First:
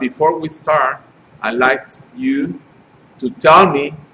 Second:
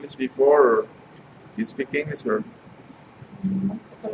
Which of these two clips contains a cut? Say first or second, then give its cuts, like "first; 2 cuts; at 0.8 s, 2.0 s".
second; 1 cut; at 1.4 s